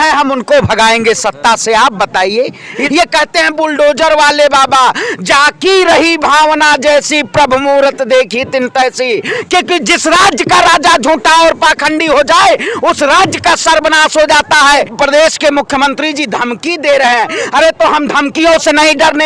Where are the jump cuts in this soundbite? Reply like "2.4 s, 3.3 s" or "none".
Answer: 2.8 s, 9.4 s, 14.9 s